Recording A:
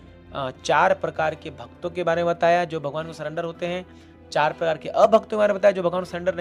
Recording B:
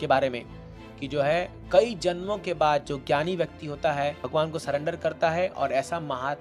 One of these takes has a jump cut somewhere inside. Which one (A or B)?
B